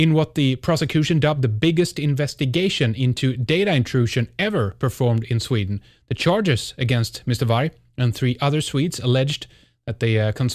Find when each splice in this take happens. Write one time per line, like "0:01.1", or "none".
0:03.4